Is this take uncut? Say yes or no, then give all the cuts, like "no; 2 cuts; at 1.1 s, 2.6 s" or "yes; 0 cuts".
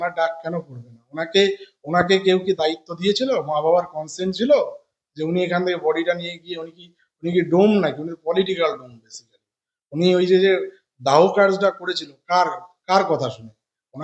yes; 0 cuts